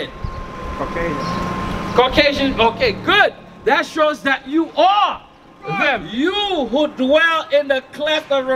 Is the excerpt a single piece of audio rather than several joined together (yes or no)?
no